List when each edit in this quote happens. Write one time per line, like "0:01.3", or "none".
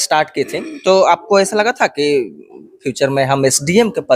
none